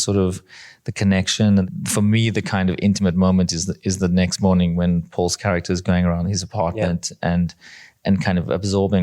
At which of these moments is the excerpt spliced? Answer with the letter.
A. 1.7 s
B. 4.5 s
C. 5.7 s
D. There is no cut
A